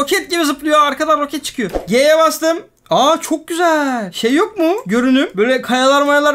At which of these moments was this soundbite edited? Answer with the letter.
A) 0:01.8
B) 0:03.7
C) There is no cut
A